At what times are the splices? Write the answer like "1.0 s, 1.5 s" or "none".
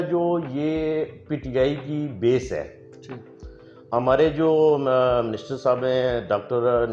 none